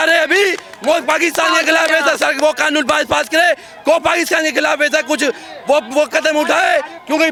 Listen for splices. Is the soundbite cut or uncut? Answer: uncut